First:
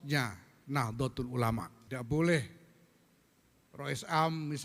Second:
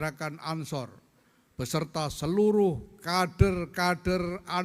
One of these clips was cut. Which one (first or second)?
first